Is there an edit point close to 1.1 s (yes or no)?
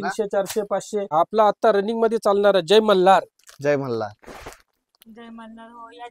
yes